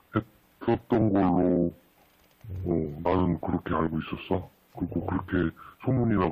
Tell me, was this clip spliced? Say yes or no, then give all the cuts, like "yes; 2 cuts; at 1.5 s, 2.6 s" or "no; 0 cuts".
yes; 1 cut; at 4.6 s